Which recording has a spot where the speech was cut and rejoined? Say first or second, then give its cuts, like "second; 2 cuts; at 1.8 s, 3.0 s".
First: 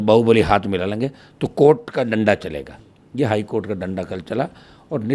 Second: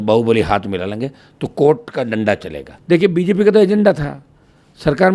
second; 1 cut; at 2.7 s